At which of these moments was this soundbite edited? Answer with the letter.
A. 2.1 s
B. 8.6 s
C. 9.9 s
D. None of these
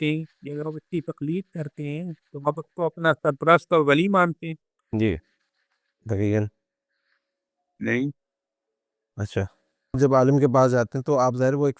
C